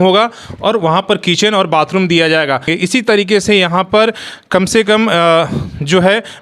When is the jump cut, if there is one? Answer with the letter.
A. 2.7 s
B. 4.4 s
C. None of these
A